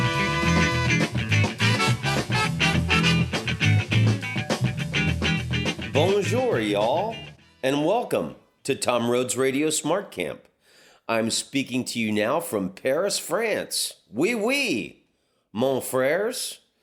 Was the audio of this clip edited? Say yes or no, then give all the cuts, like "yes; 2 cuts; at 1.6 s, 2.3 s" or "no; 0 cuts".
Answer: no; 0 cuts